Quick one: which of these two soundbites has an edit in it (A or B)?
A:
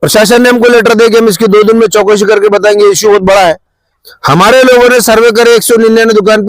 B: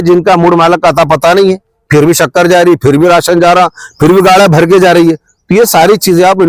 A